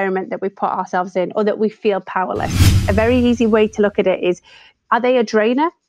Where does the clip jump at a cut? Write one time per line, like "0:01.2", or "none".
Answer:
0:02.8
0:04.8